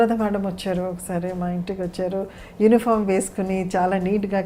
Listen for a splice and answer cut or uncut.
uncut